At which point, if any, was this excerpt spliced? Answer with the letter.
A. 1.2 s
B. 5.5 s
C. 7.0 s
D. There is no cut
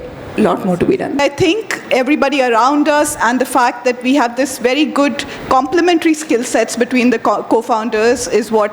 A